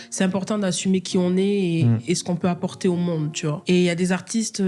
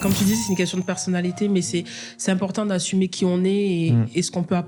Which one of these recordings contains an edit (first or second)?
first